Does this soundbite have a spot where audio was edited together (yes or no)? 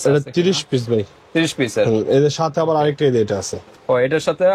no